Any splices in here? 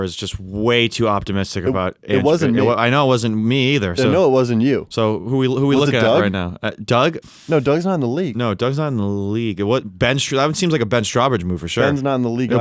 no; 0 cuts

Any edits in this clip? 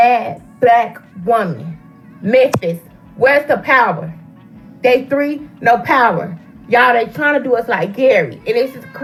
no; 0 cuts

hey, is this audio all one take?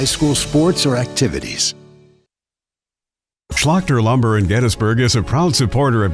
no; 1 cut; at 3.0 s

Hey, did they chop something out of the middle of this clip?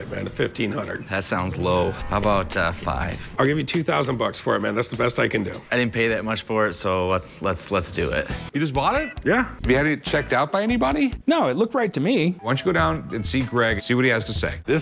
yes; 5 cuts; at 3.2 s, 8.4 s, 9.5 s, 12.4 s, 14.0 s

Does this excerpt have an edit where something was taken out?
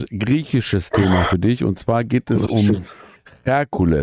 no; 0 cuts

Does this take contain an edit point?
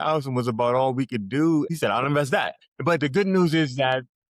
yes; 2 cuts; at 1.7 s, 2.6 s

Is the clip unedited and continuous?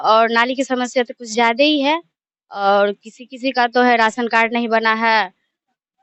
yes; 0 cuts

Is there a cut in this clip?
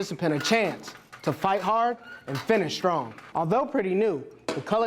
yes; 1 cut; at 3.2 s

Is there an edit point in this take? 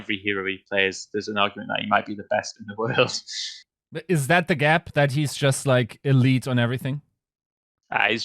no; 0 cuts

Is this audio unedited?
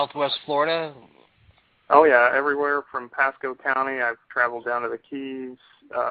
no; 1 cut; at 3.4 s

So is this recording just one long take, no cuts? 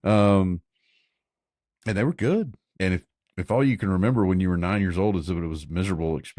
no; 1 cut; at 2.6 s

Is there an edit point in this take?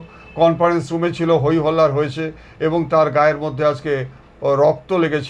no; 0 cuts

